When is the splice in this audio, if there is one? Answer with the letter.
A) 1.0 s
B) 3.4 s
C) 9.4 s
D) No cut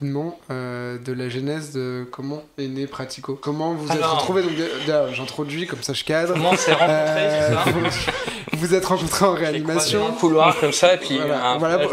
B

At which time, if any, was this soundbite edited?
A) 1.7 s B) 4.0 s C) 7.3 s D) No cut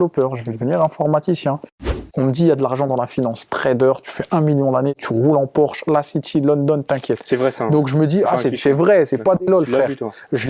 A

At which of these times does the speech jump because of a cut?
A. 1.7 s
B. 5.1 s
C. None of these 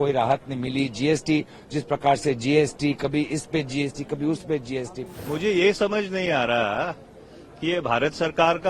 B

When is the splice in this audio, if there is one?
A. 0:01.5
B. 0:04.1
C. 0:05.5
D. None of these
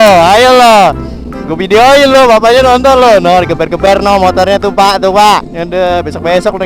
C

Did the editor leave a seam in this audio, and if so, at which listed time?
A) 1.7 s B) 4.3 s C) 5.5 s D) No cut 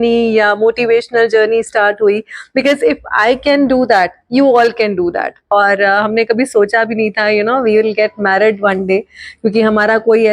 C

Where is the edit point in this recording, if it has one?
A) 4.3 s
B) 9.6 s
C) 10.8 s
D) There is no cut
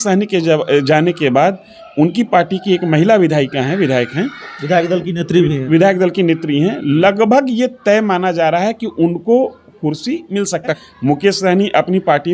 C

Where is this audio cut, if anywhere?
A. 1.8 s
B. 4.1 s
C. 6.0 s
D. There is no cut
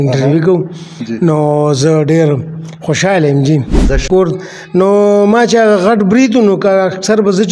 B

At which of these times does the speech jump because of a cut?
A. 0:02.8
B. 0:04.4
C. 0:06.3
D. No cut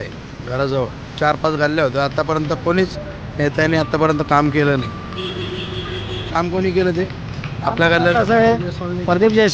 C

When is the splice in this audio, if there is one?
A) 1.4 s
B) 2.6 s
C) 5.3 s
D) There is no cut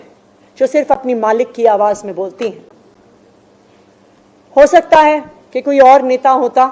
D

